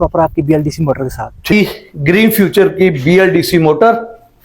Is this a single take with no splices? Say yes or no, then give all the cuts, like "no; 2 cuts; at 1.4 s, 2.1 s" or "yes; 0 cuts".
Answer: no; 1 cut; at 1.5 s